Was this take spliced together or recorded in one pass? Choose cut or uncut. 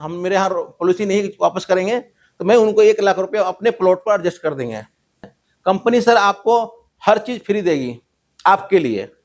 cut